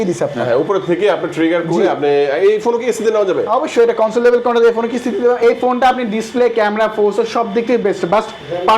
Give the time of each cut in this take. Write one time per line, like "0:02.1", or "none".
0:05.4